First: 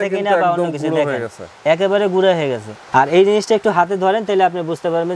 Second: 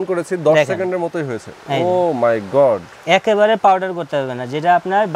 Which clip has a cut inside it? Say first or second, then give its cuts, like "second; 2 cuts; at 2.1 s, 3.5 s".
first; 1 cut; at 2.7 s